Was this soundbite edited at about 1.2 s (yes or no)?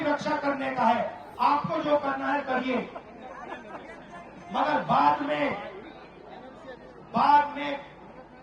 yes